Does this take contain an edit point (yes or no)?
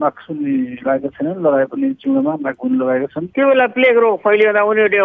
yes